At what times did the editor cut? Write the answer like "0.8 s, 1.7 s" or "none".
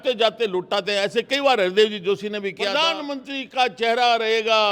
2.8 s